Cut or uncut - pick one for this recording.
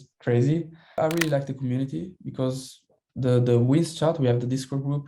cut